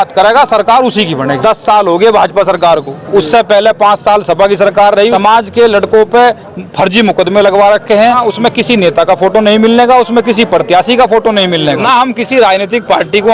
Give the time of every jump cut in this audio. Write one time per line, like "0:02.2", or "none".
0:01.4
0:05.1
0:08.3
0:11.8